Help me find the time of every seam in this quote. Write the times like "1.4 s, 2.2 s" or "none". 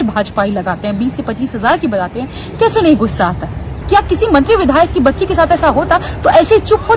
3.8 s

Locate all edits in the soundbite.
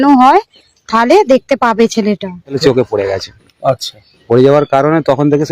2.6 s

